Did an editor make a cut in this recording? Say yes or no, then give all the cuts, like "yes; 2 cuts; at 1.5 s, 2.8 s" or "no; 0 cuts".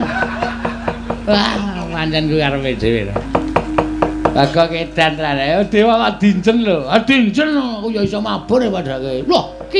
no; 0 cuts